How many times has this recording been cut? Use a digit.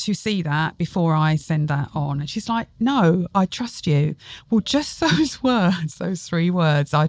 0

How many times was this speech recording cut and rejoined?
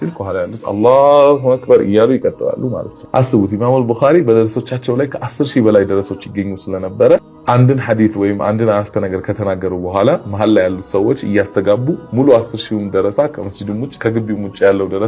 0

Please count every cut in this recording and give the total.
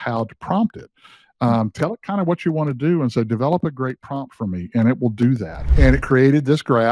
1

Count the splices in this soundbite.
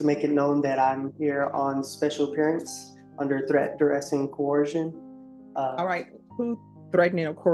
0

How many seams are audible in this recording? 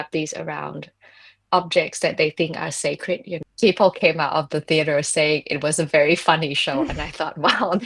1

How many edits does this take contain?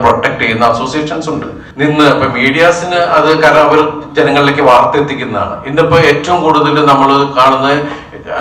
1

